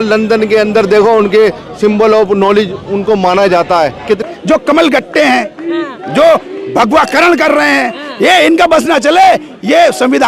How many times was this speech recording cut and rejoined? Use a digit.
1